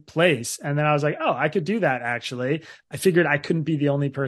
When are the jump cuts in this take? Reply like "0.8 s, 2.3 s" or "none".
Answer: 2.7 s